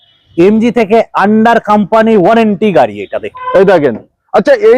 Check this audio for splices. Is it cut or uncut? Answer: cut